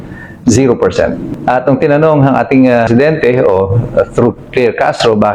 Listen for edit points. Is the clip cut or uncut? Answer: cut